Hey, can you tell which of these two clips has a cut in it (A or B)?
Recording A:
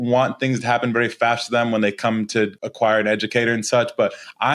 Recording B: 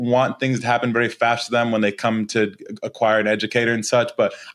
A